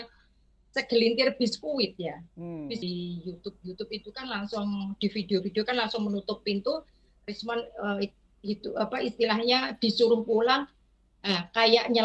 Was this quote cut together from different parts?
yes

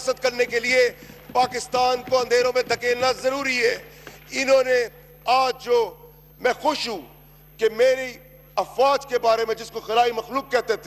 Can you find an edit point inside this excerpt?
no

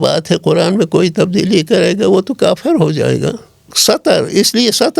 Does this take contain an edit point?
yes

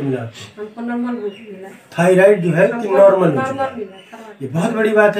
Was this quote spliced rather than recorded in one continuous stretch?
no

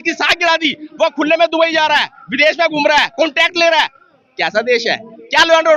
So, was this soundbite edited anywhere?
no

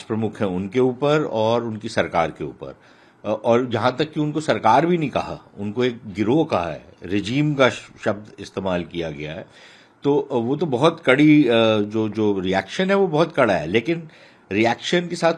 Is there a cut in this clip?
no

